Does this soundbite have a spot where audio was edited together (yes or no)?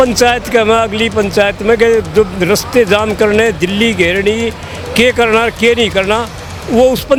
no